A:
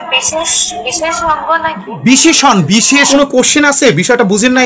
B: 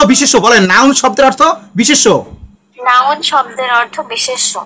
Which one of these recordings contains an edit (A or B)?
A